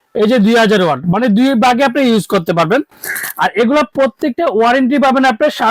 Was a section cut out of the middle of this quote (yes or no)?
no